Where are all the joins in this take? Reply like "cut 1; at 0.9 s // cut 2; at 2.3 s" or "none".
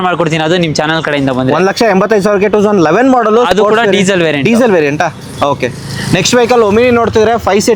none